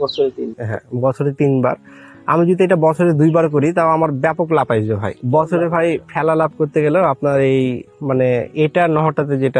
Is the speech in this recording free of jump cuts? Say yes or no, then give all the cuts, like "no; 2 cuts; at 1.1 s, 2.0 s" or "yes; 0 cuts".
no; 1 cut; at 5.1 s